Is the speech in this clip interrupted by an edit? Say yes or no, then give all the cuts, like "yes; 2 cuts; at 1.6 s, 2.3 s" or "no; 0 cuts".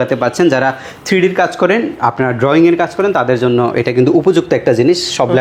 no; 0 cuts